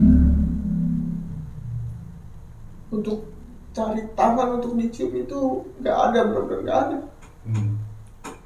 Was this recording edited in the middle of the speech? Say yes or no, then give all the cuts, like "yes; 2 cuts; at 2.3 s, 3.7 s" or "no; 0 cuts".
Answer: no; 0 cuts